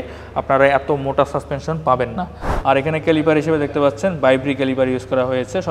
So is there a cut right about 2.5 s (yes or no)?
yes